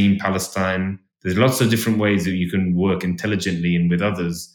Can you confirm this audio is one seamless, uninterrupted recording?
no; 1 cut; at 1.1 s

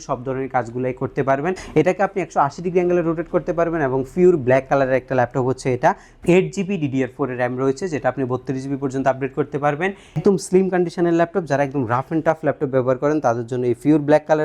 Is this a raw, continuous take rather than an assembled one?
no; 3 cuts; at 1.6 s, 6.1 s, 10.2 s

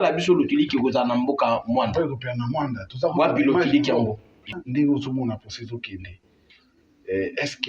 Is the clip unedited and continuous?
no; 1 cut; at 4.5 s

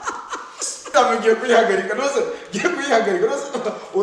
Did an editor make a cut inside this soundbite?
yes; 1 cut; at 0.9 s

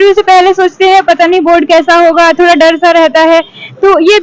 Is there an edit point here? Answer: no; 0 cuts

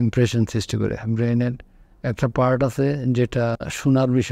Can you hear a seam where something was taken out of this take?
no; 0 cuts

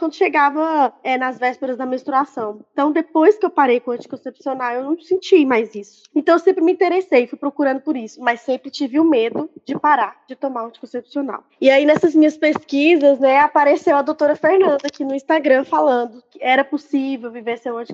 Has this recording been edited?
yes; 4 cuts; at 2.6 s, 6.0 s, 10.2 s, 16.3 s

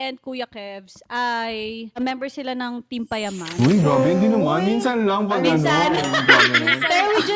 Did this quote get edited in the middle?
no; 0 cuts

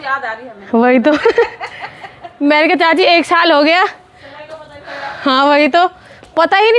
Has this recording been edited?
no; 0 cuts

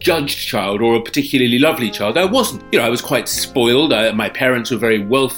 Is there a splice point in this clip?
yes; 1 cut; at 2.6 s

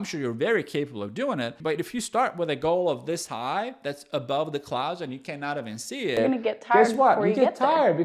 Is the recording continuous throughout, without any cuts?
no; 1 cut; at 1.6 s

